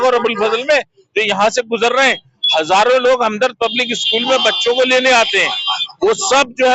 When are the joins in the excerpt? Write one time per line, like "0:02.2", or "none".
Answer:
none